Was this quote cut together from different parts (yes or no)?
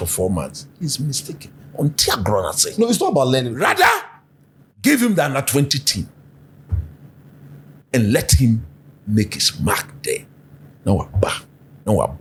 no